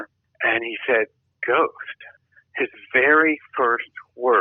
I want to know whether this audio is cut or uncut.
uncut